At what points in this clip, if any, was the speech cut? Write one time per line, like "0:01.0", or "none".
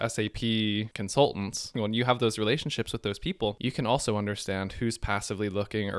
0:01.0
0:01.7
0:03.6